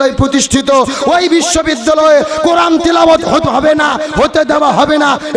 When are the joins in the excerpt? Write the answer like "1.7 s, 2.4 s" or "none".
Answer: none